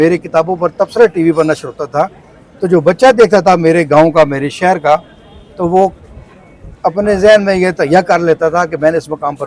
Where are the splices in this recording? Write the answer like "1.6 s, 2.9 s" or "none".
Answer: none